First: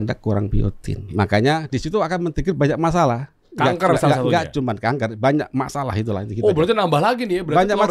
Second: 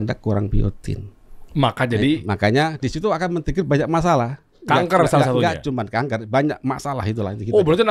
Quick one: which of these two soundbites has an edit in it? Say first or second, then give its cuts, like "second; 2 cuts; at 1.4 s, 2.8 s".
first; 1 cut; at 1.1 s